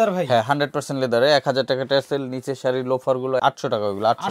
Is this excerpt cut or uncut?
cut